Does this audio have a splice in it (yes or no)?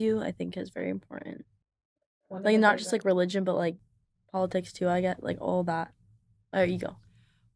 no